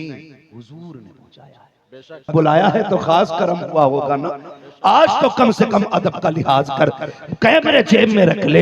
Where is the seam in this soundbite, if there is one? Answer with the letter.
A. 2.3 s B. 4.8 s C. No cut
A